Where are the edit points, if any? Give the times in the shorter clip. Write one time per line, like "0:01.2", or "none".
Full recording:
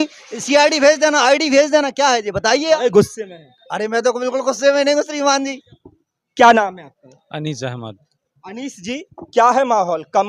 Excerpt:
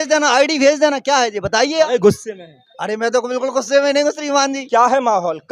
0:04.6